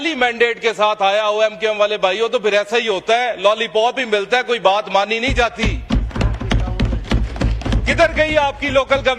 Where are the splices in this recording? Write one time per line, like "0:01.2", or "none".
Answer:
none